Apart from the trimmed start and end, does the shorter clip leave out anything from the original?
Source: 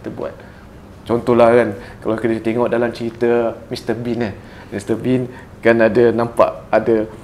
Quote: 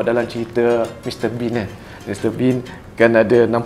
no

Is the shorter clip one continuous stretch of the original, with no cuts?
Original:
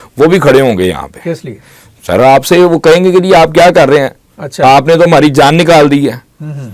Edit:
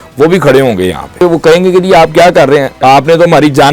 no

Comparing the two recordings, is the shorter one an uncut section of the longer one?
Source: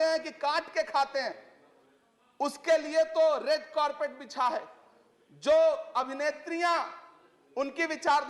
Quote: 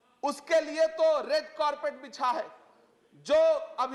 yes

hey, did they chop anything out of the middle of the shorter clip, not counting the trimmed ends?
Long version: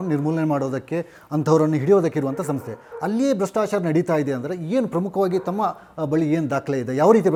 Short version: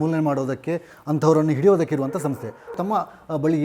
yes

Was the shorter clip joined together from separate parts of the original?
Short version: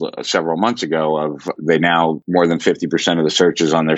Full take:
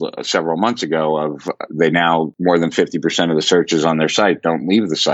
yes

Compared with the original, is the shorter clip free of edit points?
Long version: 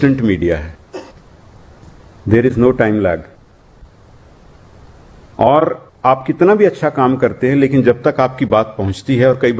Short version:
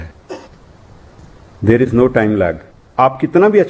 no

